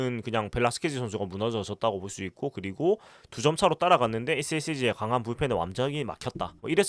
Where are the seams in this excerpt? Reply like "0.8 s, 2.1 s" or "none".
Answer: none